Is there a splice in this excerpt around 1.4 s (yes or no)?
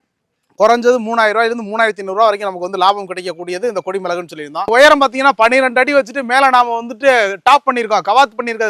no